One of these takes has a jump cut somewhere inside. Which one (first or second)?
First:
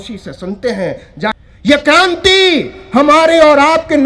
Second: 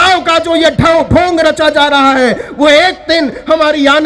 first